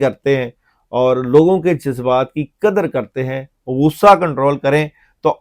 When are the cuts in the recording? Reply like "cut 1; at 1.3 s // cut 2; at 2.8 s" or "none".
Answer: none